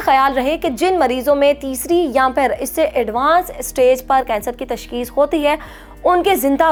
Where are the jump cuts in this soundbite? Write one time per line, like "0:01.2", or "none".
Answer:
none